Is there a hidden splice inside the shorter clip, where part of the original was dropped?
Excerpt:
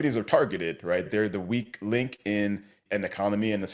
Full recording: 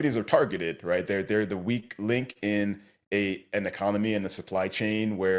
yes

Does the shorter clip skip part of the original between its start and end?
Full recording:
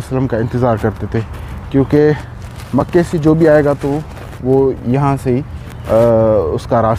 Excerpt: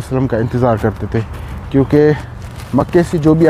no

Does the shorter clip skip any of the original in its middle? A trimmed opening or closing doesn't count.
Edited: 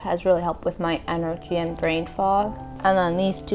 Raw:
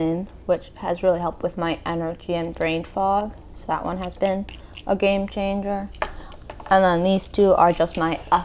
yes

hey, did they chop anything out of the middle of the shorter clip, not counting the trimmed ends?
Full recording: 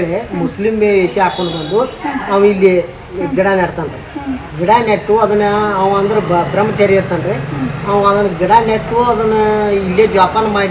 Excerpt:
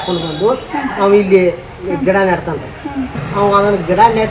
yes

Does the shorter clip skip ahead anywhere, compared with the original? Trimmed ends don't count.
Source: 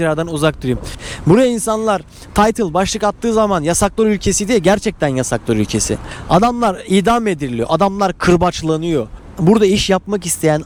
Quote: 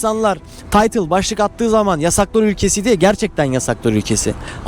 no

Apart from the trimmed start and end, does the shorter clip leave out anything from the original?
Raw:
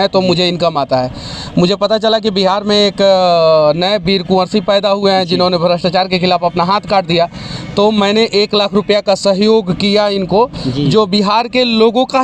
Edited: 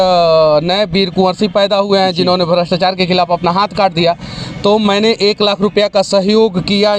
no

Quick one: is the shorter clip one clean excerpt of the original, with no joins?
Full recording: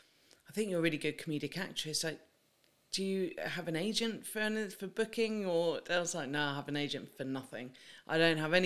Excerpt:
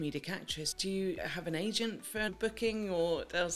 no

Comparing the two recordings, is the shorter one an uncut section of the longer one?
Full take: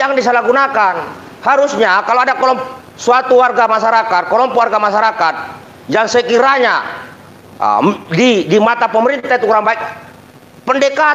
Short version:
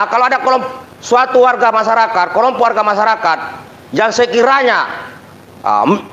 yes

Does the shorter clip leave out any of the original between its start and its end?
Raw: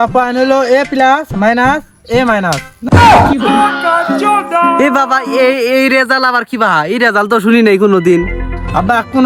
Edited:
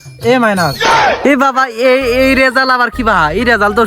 yes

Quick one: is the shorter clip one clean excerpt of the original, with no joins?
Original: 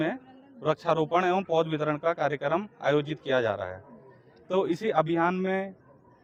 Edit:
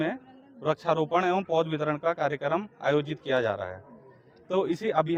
yes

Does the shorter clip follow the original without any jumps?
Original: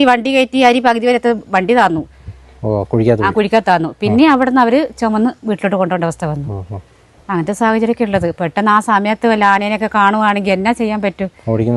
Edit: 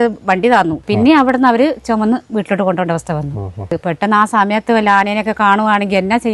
no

